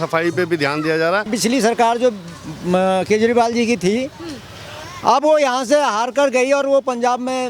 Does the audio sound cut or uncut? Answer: cut